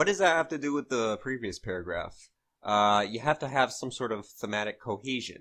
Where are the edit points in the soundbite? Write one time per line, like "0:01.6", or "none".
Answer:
0:01.2